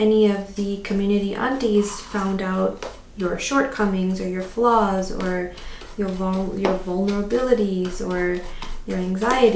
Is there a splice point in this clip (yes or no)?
no